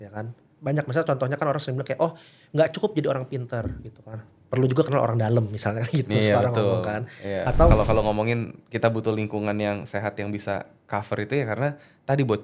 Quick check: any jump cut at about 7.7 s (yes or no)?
yes